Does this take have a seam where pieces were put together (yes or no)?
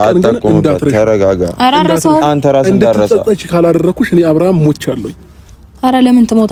no